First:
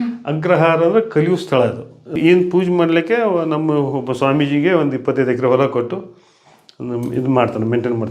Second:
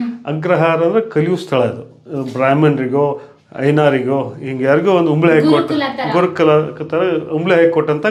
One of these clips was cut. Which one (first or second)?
first